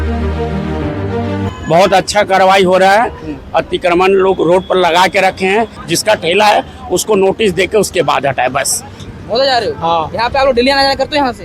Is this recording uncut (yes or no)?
no